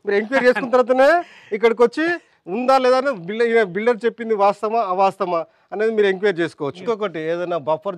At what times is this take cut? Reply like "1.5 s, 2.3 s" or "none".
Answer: 6.8 s